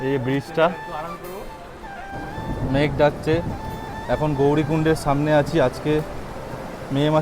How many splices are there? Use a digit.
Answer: 1